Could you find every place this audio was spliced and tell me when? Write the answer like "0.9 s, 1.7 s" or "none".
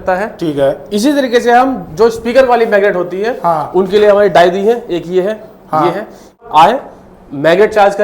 6.4 s